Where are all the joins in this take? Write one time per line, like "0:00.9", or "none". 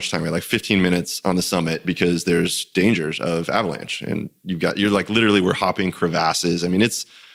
none